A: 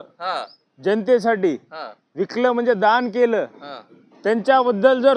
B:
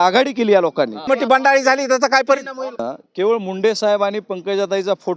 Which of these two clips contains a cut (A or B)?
B